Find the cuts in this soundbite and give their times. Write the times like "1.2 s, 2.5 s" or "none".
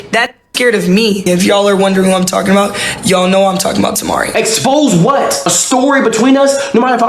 1.2 s, 4.3 s